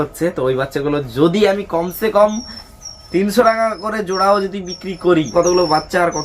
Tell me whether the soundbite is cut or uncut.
cut